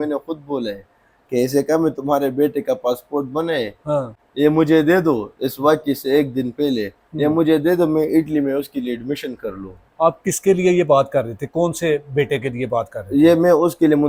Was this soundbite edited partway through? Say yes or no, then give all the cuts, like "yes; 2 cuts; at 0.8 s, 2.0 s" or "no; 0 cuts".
no; 0 cuts